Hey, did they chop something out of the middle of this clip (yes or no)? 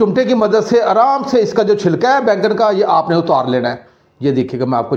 no